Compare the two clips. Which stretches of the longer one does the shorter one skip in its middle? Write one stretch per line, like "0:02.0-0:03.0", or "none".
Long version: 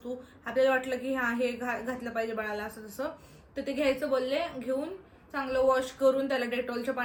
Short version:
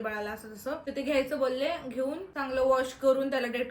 0:03.2-0:03.6
0:05.0-0:05.3